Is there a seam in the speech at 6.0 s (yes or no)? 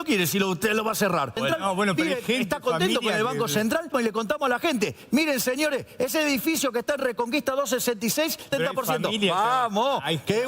no